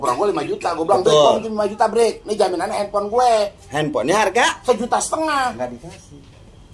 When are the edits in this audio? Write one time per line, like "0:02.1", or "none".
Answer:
none